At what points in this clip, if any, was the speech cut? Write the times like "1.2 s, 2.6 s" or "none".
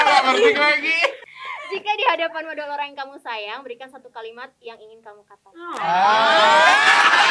1.2 s